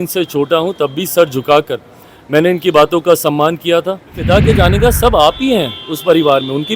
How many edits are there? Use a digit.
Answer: 1